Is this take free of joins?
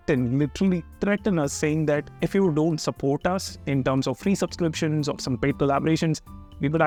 yes; 0 cuts

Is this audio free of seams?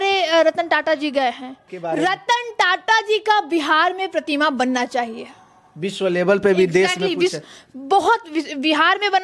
no; 1 cut; at 1.7 s

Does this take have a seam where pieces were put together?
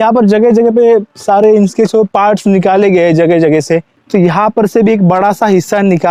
no; 0 cuts

